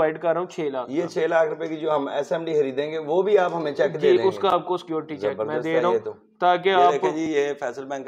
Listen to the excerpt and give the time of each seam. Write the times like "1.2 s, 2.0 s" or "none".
none